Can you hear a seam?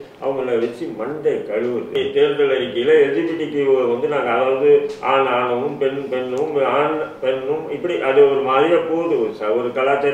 yes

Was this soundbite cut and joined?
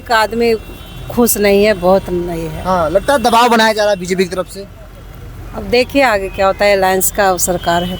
no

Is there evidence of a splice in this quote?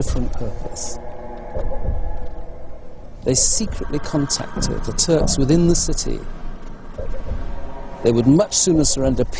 yes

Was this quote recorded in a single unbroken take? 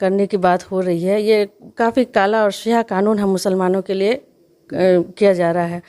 yes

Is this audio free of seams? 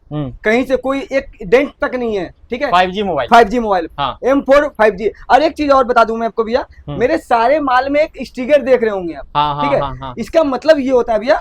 yes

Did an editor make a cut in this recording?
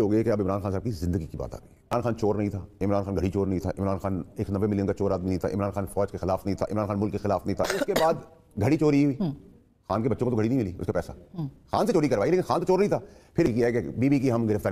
yes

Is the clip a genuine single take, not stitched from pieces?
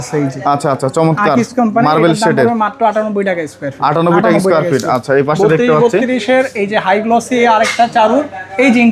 yes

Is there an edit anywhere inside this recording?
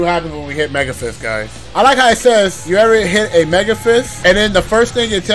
yes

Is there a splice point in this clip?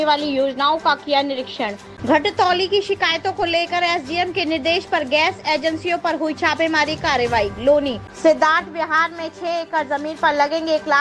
yes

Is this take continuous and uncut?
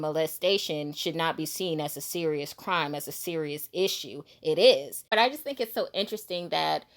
no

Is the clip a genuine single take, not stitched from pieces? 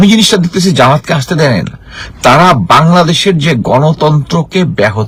yes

